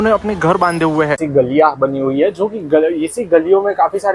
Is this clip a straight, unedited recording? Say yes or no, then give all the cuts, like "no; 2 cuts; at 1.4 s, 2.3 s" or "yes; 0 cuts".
no; 1 cut; at 1.2 s